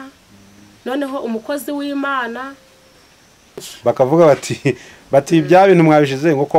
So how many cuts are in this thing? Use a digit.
1